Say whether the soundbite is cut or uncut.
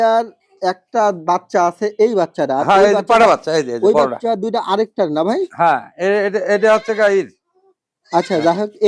uncut